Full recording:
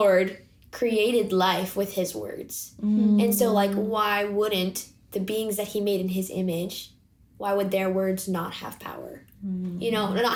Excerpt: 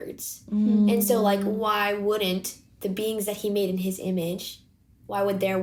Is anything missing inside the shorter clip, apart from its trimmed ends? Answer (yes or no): no